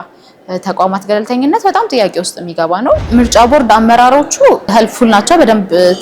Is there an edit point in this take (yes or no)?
yes